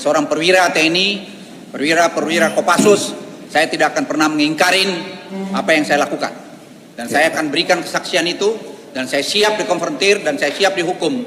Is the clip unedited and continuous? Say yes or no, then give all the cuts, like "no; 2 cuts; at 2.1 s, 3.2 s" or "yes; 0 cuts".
yes; 0 cuts